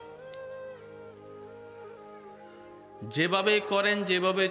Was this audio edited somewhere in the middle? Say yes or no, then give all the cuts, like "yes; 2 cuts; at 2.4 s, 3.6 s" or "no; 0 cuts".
no; 0 cuts